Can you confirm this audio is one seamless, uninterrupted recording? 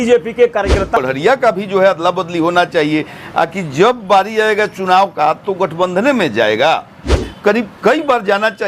no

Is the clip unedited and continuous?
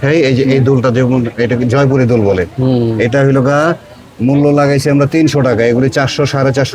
yes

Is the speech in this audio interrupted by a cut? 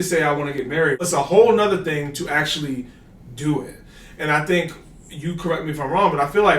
yes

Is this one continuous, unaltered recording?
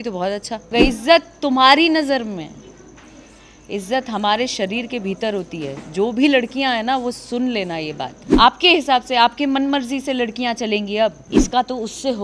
no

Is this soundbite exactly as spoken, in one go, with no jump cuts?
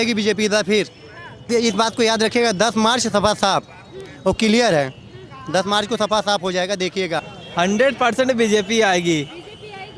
no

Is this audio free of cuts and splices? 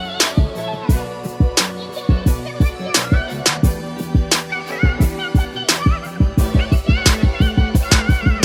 yes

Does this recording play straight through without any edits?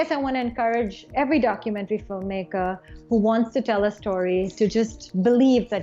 no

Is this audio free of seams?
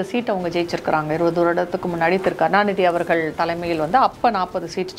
yes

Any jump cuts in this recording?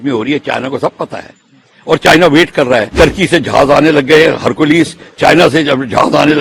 yes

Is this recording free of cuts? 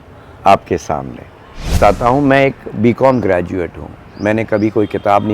no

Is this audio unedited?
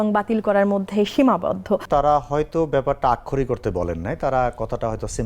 no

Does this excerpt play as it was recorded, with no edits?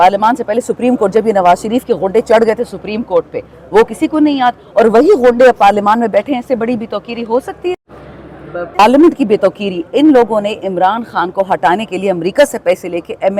yes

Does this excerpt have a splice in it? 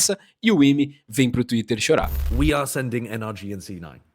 yes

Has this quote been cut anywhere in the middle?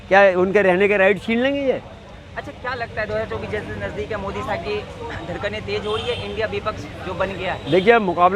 no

